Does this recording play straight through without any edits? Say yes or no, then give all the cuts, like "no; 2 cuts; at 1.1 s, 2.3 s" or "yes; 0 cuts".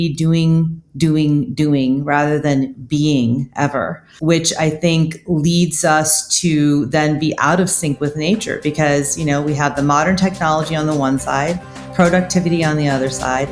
no; 1 cut; at 4.0 s